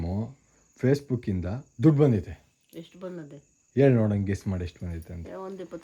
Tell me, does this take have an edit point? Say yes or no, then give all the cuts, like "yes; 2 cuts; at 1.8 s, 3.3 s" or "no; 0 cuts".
no; 0 cuts